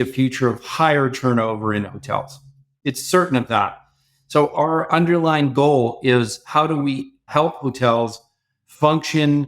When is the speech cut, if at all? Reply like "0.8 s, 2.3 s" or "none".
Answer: 7.3 s